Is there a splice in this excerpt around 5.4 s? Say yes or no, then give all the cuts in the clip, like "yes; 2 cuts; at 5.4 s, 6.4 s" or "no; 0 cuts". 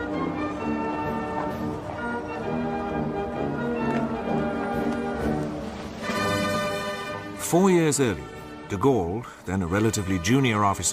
no; 1 cut; at 6.8 s